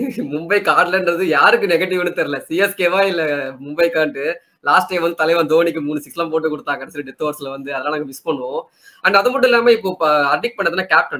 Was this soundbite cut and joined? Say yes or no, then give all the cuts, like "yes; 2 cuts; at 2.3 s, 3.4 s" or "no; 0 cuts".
no; 0 cuts